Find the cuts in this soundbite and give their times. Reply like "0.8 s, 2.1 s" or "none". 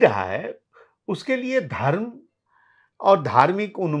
none